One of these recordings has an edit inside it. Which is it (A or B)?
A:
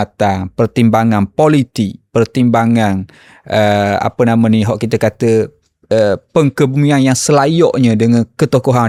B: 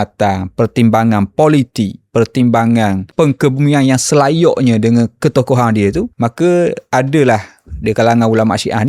B